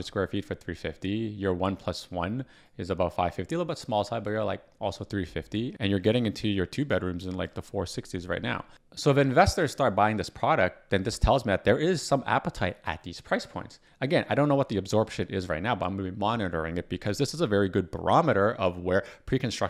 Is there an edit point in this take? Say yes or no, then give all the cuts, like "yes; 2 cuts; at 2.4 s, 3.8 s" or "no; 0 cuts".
no; 0 cuts